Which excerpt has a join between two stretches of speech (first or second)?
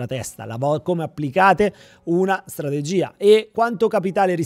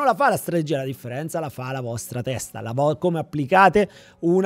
first